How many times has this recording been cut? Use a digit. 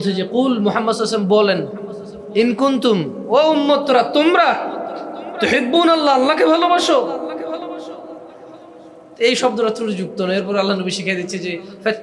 0